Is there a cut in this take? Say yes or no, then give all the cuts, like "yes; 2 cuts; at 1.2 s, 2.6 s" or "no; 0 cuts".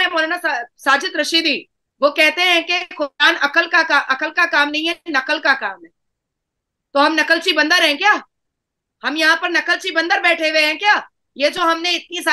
no; 0 cuts